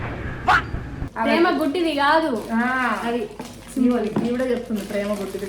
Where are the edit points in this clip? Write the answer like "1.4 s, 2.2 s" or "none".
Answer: 1.0 s